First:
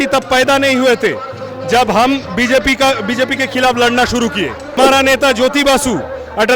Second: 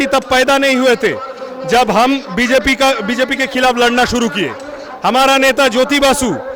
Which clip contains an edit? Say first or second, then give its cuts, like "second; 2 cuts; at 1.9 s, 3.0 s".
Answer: first; 1 cut; at 4.8 s